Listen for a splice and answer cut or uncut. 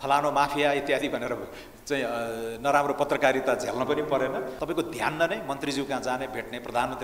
cut